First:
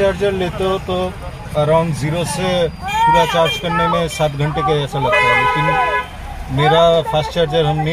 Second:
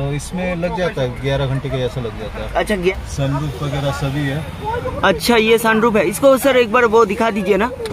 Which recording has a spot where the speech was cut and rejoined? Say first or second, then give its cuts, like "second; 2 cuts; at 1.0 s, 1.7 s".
second; 1 cut; at 2.9 s